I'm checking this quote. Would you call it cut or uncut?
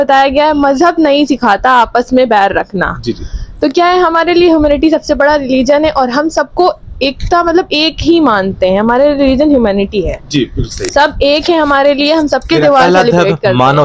uncut